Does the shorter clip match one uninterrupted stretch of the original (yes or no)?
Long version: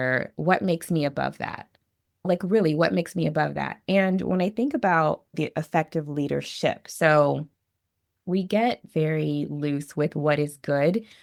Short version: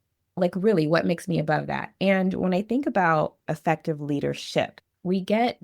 no